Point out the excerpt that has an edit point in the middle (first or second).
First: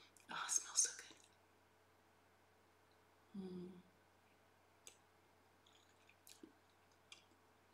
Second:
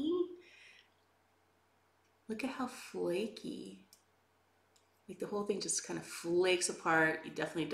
second